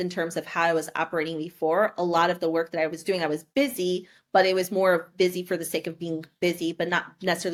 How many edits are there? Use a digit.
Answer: 0